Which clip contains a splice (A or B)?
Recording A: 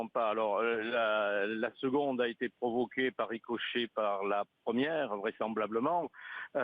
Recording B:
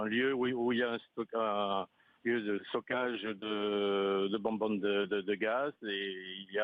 A